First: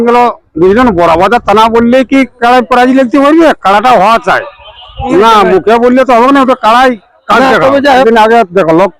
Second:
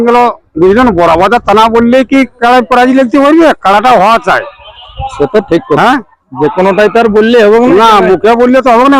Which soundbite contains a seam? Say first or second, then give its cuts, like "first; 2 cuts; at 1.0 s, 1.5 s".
first; 2 cuts; at 5.1 s, 8.0 s